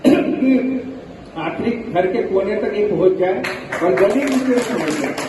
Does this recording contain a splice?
no; 0 cuts

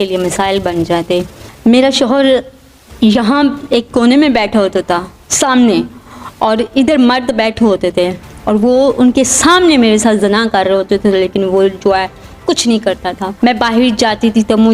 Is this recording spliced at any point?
yes; 2 cuts; at 1.4 s, 13.3 s

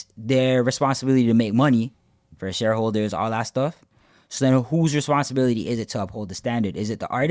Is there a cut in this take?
no; 0 cuts

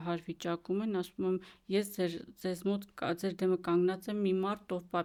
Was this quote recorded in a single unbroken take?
yes; 0 cuts

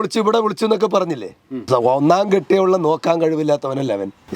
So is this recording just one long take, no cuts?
no; 1 cut; at 1.6 s

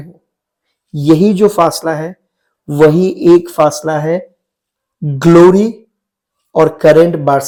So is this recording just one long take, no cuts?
yes; 0 cuts

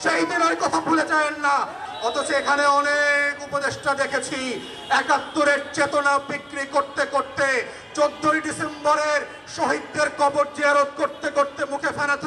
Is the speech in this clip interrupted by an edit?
yes; 1 cut; at 1.8 s

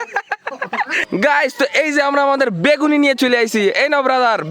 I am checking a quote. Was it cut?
yes; 1 cut; at 1.0 s

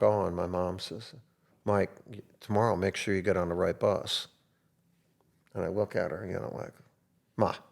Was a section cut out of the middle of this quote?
no; 0 cuts

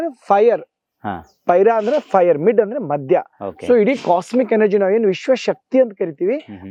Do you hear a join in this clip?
no; 0 cuts

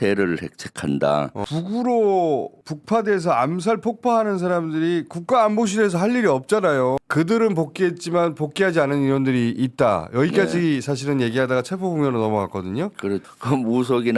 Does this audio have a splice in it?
yes; 3 cuts; at 1.4 s, 7.0 s, 13.2 s

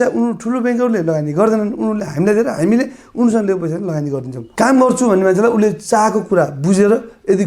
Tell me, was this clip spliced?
yes; 1 cut; at 4.4 s

